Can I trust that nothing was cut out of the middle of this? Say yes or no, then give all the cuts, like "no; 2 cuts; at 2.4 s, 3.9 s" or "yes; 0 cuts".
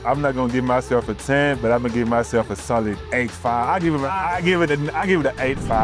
no; 1 cut; at 3.0 s